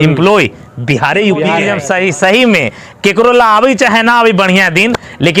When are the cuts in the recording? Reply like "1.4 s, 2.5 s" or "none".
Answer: 1.7 s

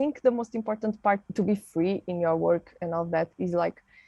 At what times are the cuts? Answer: 1.3 s

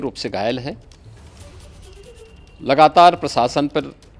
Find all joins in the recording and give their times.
none

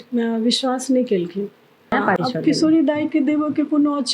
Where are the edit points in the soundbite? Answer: 1.9 s

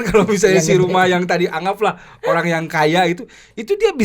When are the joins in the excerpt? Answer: none

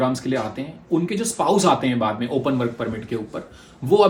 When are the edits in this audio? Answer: none

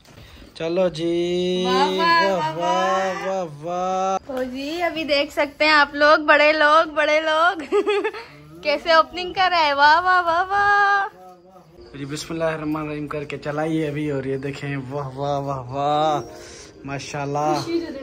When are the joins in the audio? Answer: 4.2 s, 11.8 s

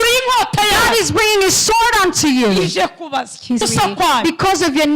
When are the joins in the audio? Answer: 3.7 s

